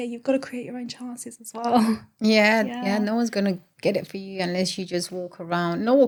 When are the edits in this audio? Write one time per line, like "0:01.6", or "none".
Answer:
none